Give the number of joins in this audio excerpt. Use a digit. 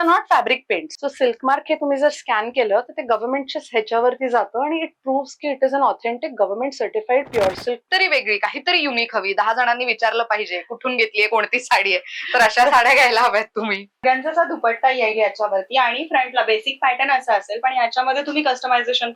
3